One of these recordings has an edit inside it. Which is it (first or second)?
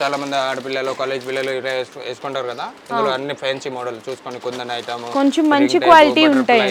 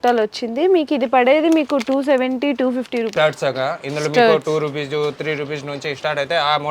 second